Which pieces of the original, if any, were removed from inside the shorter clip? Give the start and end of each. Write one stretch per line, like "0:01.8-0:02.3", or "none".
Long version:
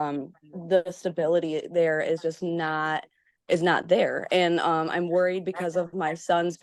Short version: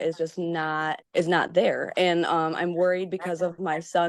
0:03.1-0:03.4